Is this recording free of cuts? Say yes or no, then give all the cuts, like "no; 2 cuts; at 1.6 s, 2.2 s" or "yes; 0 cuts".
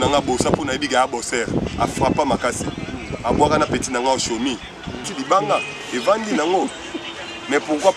no; 1 cut; at 5.1 s